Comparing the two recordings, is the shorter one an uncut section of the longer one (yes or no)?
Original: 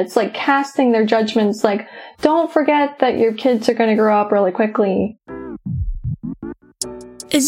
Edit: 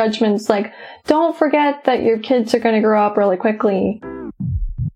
no